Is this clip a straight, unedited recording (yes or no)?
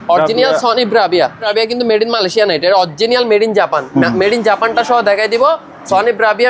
no